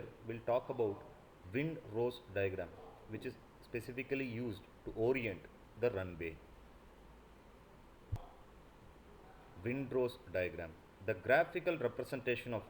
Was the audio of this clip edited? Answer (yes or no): yes